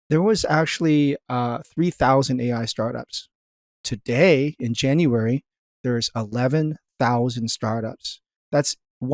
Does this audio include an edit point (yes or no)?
no